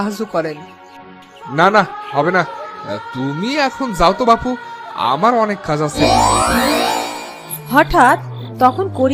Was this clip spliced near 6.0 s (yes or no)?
yes